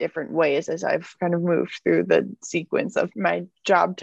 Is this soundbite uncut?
no; 2 cuts; at 1.2 s, 3.1 s

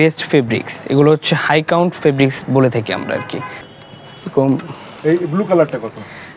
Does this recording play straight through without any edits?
no; 1 cut; at 3.5 s

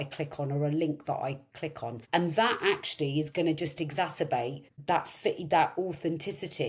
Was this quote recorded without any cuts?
no; 2 cuts; at 1.9 s, 4.7 s

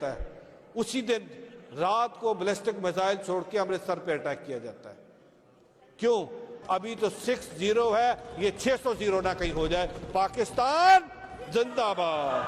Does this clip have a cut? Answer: yes; 1 cut; at 6.5 s

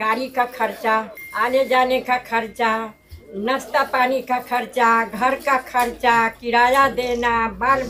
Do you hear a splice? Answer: no; 0 cuts

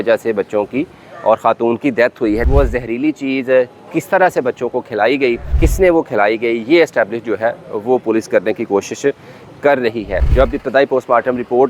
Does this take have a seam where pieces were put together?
yes; 3 cuts; at 2.4 s, 5.5 s, 10.2 s

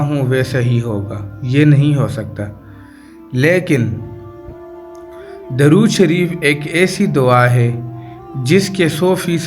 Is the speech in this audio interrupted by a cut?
yes; 2 cuts; at 4.0 s, 5.5 s

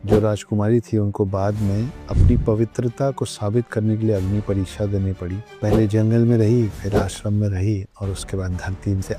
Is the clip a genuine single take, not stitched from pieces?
yes; 0 cuts

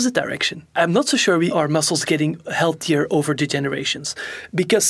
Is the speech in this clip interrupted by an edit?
yes; 2 cuts; at 0.8 s, 1.5 s

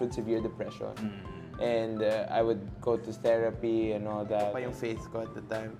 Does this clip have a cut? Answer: yes; 1 cut; at 4.7 s

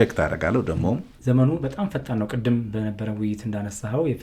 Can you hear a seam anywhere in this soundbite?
yes; 1 cut; at 1.1 s

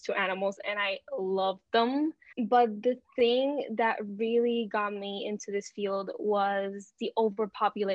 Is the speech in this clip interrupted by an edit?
yes; 1 cut; at 2.3 s

